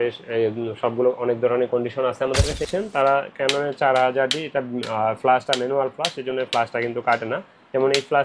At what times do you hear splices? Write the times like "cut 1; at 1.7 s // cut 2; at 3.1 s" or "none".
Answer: cut 1; at 2.6 s